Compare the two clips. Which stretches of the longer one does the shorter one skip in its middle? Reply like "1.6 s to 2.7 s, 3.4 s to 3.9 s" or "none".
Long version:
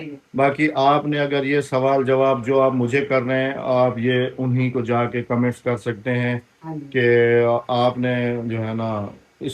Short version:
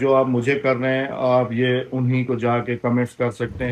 none